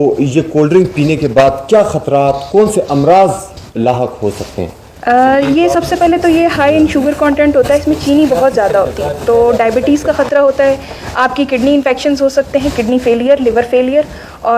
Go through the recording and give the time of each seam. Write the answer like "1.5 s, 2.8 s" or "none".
none